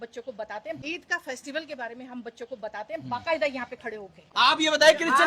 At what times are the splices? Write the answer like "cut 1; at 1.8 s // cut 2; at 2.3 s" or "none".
cut 1; at 0.8 s // cut 2; at 3.0 s // cut 3; at 4.2 s